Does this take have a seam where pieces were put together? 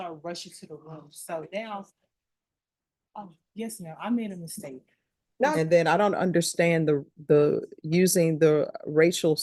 yes; 1 cut; at 5.6 s

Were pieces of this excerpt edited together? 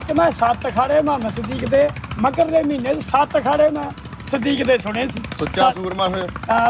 no; 0 cuts

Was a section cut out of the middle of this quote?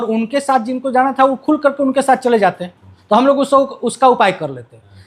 yes; 1 cut; at 2.9 s

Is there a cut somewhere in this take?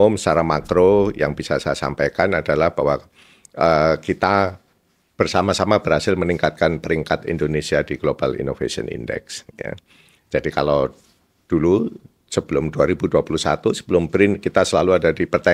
no; 0 cuts

